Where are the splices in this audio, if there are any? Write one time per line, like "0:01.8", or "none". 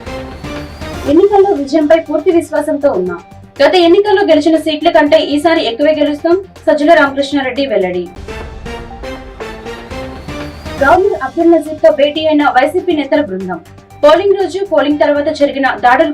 0:00.9

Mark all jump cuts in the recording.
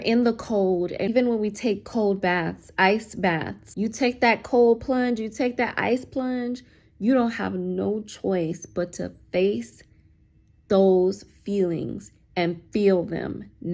0:01.0
0:03.6

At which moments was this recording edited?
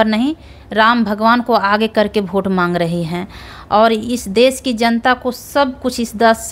none

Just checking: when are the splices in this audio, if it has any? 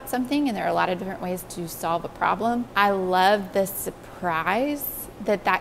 0:02.7

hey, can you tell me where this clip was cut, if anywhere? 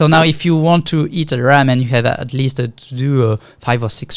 none

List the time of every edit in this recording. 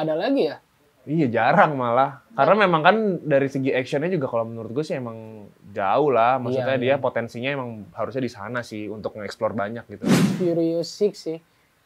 0:10.3

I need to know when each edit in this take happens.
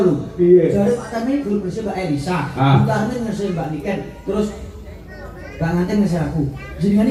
none

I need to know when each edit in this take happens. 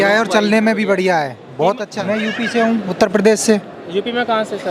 0:02.0

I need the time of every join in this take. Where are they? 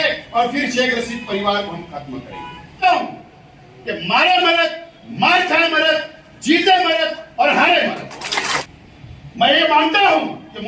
0:02.8
0:08.6

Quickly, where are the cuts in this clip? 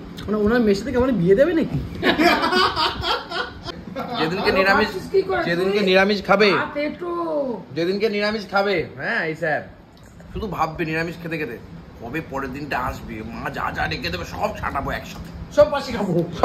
0:03.8

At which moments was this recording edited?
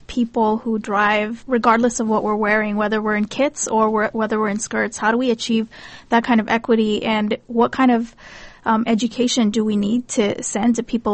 0:01.4

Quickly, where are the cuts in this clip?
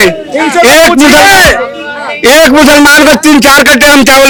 none

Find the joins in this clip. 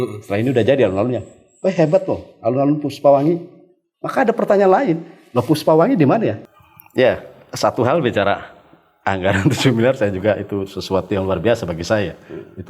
0:06.5

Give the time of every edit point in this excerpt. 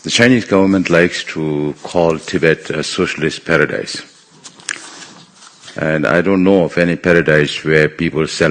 none

